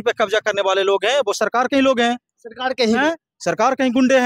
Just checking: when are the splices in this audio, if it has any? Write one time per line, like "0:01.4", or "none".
none